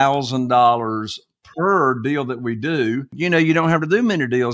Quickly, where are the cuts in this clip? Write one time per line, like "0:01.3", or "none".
0:03.1